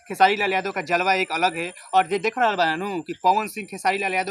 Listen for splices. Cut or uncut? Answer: uncut